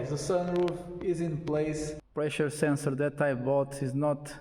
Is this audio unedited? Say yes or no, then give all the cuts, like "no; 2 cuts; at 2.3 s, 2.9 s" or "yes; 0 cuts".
no; 1 cut; at 2.0 s